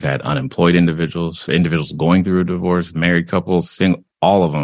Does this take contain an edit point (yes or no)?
yes